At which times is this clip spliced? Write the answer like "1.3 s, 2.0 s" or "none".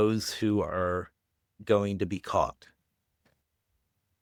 none